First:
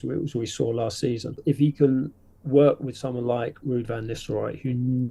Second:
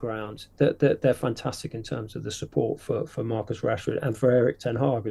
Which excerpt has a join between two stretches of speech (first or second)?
first